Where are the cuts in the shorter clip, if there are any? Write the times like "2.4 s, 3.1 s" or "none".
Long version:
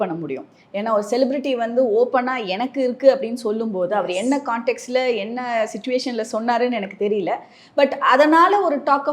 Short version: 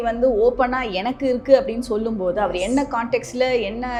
none